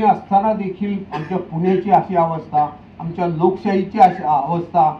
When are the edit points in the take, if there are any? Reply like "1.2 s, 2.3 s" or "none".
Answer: none